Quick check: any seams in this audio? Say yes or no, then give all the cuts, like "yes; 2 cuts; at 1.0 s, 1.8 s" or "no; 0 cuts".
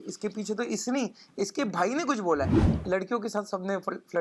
yes; 1 cut; at 2.7 s